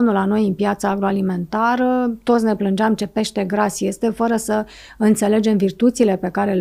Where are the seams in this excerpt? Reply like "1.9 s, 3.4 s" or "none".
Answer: none